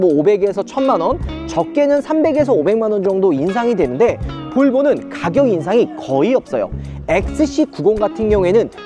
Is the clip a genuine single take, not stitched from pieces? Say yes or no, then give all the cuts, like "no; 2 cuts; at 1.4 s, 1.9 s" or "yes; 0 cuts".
yes; 0 cuts